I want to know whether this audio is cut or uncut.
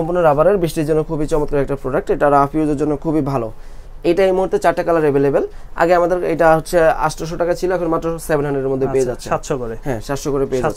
uncut